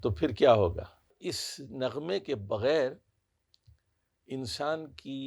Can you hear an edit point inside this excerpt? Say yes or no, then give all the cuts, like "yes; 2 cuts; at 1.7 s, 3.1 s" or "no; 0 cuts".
yes; 1 cut; at 1.1 s